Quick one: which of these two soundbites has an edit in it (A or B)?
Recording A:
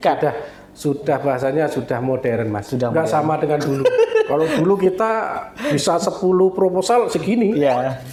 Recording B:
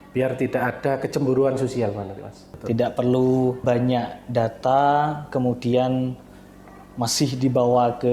B